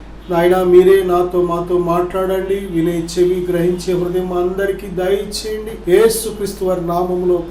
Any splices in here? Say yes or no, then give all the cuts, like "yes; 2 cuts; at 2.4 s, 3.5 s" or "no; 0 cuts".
yes; 1 cut; at 5.7 s